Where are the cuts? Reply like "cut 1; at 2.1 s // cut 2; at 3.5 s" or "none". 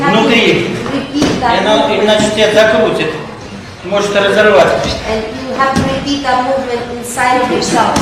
cut 1; at 4.5 s // cut 2; at 5.7 s